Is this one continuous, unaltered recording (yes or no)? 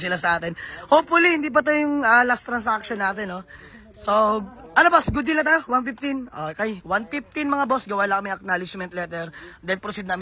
yes